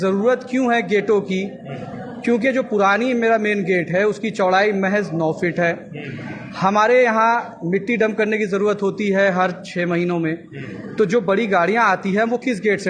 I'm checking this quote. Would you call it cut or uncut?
uncut